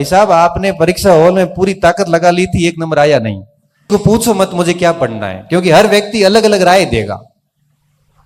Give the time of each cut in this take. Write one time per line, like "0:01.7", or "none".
0:03.9